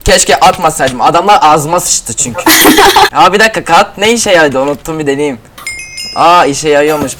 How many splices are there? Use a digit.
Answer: 1